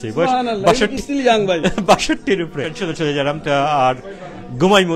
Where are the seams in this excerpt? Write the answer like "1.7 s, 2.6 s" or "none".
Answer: 2.8 s